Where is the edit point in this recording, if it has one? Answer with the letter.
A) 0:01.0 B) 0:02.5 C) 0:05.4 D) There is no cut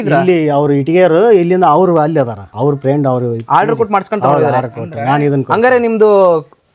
B